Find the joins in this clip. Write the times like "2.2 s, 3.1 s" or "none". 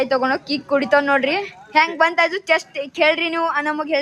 none